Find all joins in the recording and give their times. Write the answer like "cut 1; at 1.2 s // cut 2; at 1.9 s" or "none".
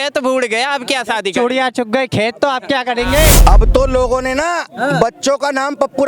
cut 1; at 3.4 s